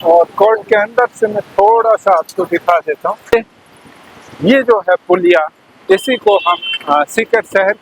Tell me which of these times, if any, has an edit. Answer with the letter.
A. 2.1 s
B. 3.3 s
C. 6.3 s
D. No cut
B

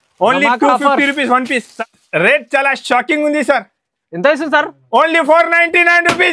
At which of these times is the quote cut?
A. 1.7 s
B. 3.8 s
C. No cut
A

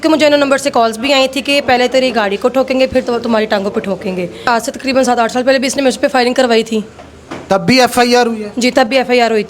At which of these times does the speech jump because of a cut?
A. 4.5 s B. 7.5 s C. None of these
A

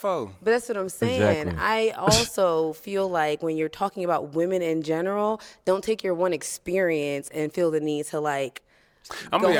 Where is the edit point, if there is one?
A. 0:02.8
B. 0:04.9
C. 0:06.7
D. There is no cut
D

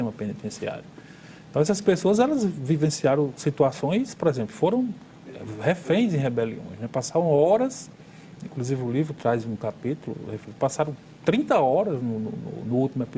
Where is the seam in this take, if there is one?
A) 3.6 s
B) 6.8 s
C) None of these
C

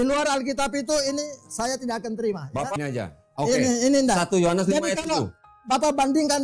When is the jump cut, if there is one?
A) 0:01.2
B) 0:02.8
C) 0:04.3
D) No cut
B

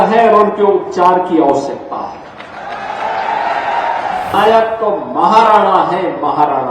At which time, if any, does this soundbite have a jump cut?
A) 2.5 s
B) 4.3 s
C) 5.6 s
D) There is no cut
B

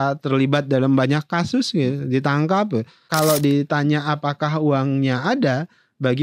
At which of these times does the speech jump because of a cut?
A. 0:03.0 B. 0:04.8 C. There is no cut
A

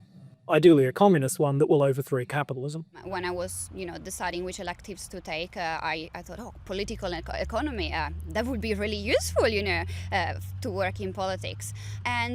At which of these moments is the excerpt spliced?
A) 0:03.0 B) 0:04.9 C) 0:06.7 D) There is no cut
A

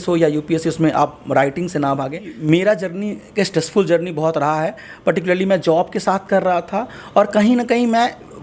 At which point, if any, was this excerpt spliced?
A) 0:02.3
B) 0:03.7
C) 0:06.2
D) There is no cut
A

